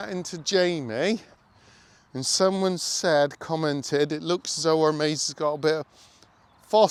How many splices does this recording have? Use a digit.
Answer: 0